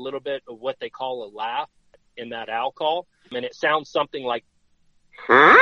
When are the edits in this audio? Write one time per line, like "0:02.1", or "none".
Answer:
0:01.9
0:03.3
0:04.4